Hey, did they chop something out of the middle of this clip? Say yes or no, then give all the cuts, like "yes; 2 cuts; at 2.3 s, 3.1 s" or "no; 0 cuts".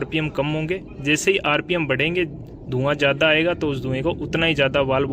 no; 0 cuts